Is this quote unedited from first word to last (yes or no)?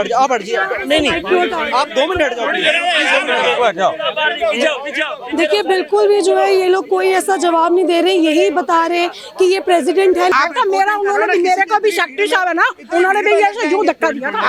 yes